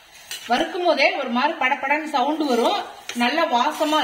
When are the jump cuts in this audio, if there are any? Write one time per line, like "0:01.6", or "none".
none